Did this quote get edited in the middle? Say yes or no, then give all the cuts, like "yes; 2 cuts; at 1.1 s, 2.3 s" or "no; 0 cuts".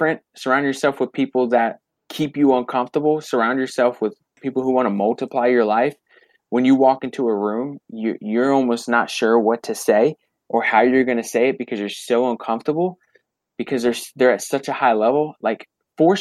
no; 0 cuts